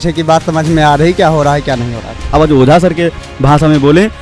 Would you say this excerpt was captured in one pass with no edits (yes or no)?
no